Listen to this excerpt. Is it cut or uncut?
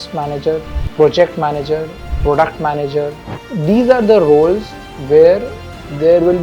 uncut